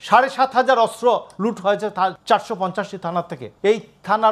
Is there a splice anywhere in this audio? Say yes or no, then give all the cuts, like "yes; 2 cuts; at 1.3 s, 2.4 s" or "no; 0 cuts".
yes; 2 cuts; at 2.2 s, 3.4 s